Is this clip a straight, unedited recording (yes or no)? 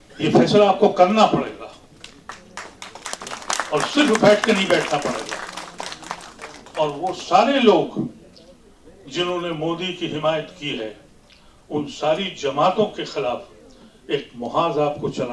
yes